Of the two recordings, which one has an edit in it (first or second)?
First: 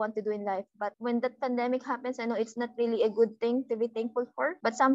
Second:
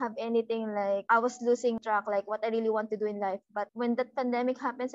second